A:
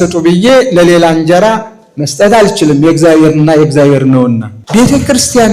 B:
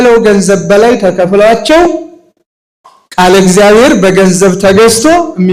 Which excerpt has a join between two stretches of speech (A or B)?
A